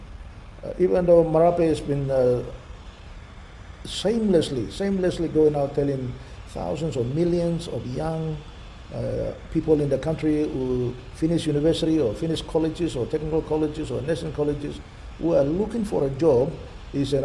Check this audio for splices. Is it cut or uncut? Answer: uncut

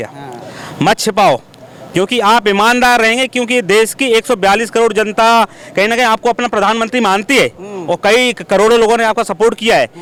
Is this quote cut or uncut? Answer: uncut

